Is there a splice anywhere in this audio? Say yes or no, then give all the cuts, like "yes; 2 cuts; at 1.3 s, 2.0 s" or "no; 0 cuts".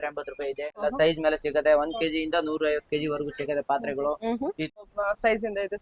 yes; 2 cuts; at 0.8 s, 4.8 s